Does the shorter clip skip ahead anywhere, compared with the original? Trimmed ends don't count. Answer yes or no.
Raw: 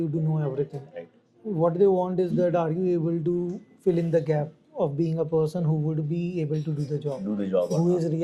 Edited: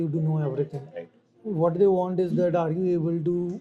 no